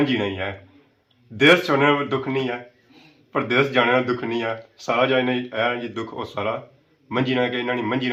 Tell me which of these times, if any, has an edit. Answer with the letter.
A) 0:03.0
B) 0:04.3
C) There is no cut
C